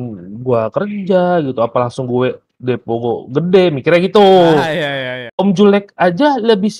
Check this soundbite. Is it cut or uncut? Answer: cut